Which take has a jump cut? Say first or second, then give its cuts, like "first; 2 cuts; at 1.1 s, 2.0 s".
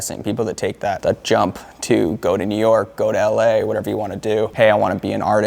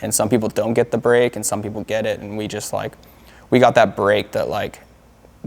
first; 1 cut; at 4.5 s